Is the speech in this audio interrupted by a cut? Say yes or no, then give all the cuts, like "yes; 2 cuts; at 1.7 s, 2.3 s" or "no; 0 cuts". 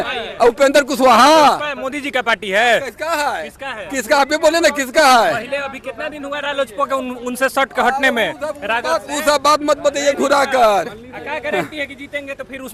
no; 0 cuts